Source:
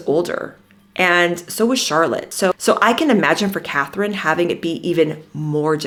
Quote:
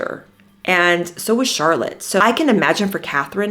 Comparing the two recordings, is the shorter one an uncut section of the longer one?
no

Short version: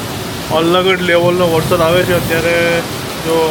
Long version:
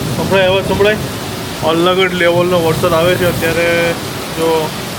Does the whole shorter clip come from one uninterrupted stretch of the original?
yes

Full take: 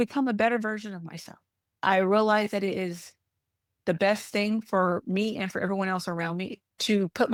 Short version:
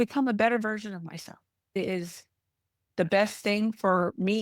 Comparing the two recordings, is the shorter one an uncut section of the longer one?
no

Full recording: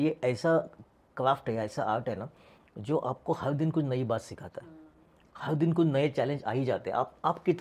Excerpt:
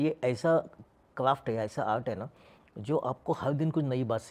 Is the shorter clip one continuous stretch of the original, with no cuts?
yes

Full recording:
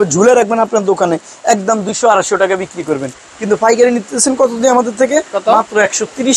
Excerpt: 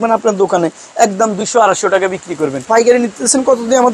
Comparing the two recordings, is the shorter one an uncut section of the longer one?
no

